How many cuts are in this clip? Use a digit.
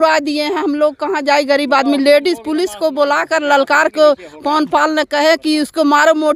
0